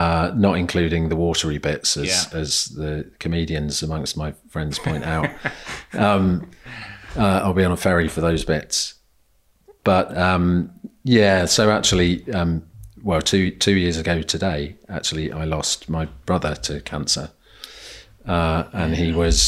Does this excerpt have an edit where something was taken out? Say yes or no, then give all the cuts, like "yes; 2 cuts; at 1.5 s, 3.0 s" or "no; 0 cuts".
no; 0 cuts